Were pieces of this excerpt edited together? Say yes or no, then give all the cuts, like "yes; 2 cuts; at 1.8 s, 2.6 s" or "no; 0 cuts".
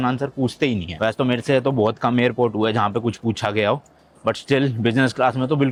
no; 0 cuts